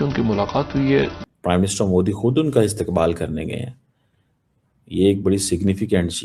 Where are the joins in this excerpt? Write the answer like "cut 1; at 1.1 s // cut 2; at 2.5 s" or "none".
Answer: cut 1; at 1.2 s